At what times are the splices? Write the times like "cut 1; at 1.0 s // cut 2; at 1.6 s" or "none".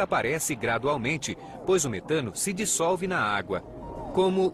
cut 1; at 1.8 s

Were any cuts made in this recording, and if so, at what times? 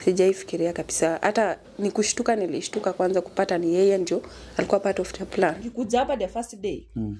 cut 1; at 5.7 s

